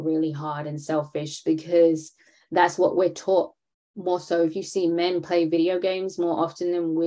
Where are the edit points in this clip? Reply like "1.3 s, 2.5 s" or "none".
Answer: none